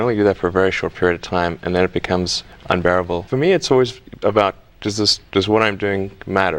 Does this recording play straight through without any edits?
no; 1 cut; at 3.2 s

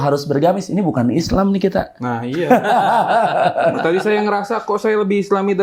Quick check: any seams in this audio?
no; 0 cuts

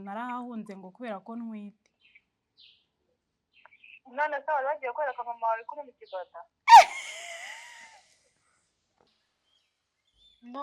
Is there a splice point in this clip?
yes; 1 cut; at 9.1 s

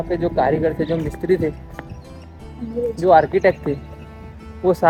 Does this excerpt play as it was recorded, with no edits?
yes; 0 cuts

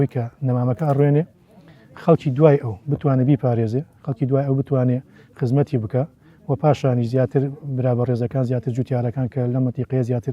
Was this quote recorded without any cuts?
yes; 0 cuts

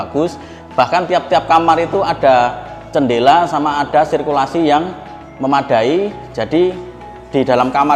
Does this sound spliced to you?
no; 0 cuts

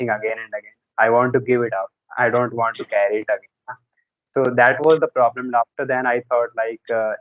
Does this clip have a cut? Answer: no; 0 cuts

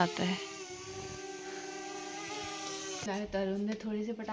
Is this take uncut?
no; 1 cut; at 3.0 s

